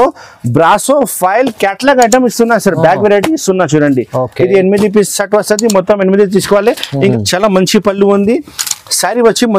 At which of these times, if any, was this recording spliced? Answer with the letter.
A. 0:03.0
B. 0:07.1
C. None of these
B